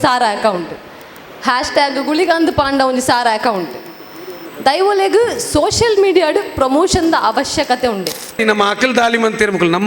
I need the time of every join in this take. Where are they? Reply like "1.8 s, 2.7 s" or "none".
8.4 s

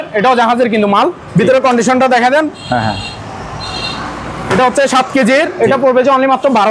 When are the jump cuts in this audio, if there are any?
none

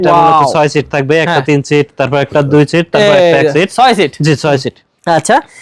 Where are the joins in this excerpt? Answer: none

